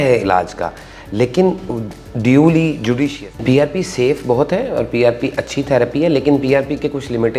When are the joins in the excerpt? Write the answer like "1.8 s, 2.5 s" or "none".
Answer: 3.3 s